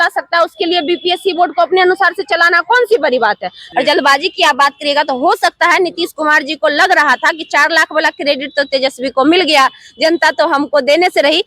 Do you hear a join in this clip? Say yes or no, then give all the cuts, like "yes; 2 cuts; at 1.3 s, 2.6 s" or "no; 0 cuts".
yes; 1 cut; at 3.6 s